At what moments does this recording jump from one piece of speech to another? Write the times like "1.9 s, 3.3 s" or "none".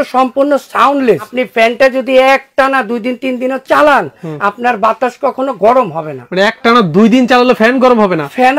1.3 s